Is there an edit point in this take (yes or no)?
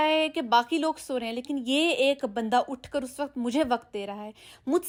no